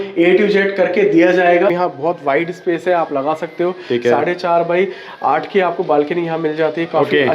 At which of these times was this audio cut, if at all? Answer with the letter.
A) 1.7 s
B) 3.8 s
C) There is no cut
A